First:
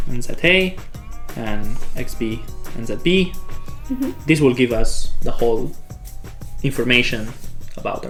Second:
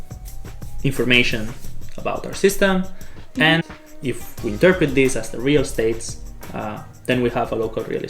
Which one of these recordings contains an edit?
second; 1 cut; at 3.6 s

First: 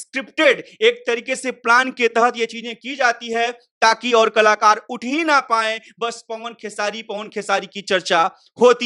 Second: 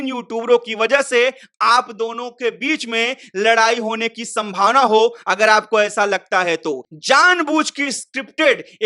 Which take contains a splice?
second; 1 cut; at 6.9 s

